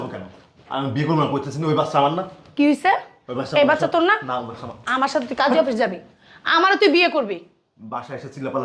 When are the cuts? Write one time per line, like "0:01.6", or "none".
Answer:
none